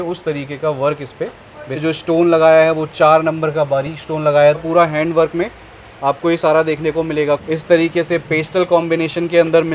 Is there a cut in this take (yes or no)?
yes